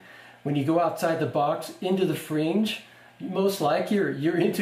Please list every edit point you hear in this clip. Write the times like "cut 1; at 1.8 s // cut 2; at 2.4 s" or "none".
none